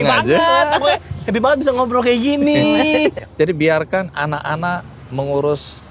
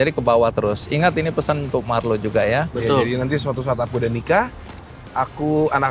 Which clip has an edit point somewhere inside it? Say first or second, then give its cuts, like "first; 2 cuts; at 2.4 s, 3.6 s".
first; 1 cut; at 3.2 s